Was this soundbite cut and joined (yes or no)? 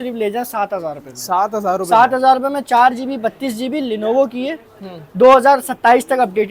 no